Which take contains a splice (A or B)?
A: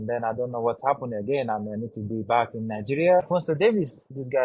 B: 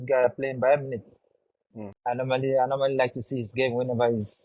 A